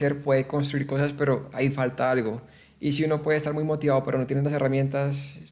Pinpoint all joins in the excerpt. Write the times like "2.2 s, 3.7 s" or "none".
none